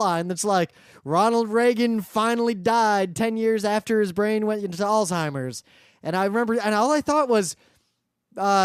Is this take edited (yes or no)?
no